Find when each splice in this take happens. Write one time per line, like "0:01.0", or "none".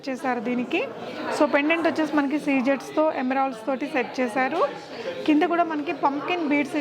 none